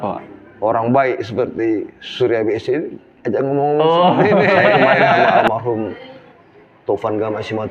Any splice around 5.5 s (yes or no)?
yes